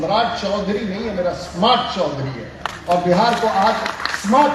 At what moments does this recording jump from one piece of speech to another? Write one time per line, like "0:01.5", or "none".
none